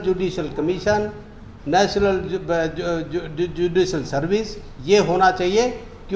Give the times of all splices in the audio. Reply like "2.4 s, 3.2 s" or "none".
none